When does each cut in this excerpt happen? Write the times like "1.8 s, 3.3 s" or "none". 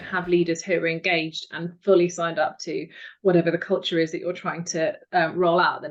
none